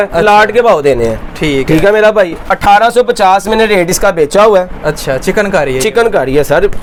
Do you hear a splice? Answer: no; 0 cuts

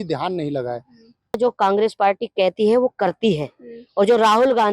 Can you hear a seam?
yes; 1 cut; at 1.4 s

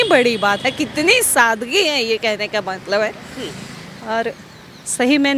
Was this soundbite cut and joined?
no; 0 cuts

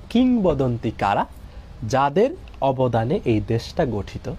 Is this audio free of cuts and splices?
yes; 0 cuts

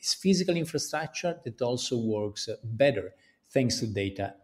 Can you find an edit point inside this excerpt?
no; 0 cuts

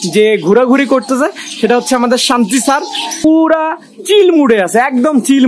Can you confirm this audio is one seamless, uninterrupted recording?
no; 1 cut; at 3.2 s

